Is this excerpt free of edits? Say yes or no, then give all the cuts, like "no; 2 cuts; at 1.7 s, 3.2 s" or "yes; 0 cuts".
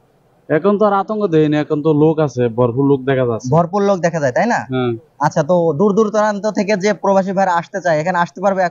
yes; 0 cuts